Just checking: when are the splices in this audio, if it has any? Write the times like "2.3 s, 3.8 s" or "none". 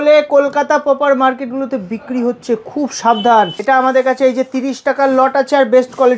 3.6 s